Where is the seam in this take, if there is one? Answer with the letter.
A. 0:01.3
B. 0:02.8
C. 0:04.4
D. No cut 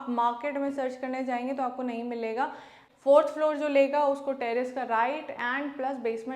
B